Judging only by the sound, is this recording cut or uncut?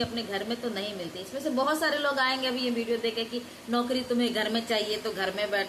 uncut